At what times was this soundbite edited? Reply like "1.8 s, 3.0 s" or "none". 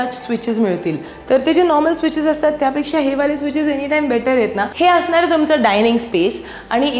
4.7 s